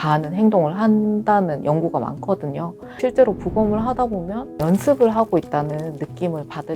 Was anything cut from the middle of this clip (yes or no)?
yes